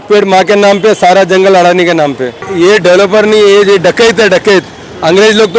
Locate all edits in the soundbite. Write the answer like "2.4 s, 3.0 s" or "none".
2.5 s